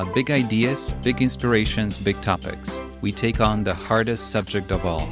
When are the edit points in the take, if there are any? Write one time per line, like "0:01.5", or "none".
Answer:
none